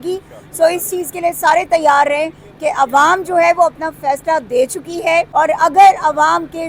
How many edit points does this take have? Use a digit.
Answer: 1